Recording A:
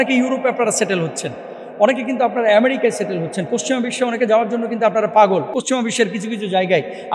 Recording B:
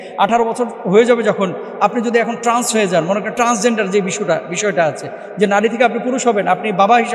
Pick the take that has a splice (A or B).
A